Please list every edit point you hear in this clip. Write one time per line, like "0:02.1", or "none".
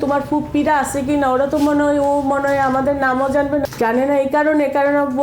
0:03.7